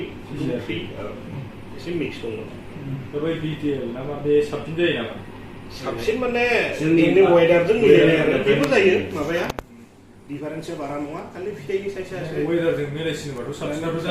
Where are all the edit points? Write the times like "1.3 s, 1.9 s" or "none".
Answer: none